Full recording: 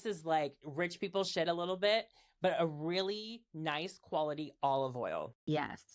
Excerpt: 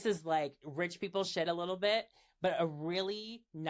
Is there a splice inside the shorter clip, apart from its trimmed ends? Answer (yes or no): no